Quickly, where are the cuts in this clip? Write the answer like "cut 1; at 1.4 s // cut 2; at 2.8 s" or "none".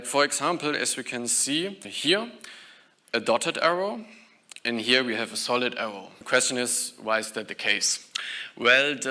cut 1; at 1.9 s // cut 2; at 6.1 s